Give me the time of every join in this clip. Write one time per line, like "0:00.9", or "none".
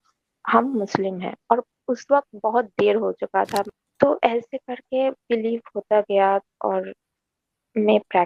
0:03.7